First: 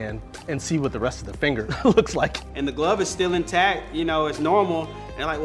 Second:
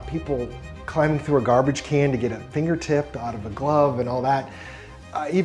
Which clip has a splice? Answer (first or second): first